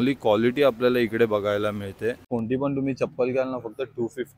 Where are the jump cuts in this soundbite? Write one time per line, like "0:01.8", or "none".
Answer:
0:02.3